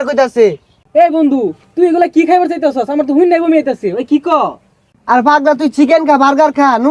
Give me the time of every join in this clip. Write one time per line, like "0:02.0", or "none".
none